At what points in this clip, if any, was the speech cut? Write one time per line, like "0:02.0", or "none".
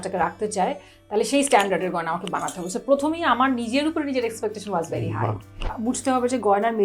0:05.8